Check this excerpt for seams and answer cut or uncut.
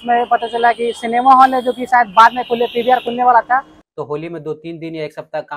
cut